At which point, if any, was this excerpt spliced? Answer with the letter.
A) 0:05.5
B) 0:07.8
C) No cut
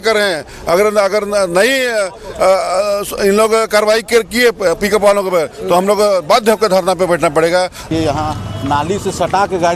B